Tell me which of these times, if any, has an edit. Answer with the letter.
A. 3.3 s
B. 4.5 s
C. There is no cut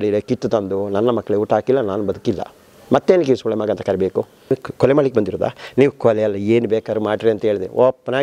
B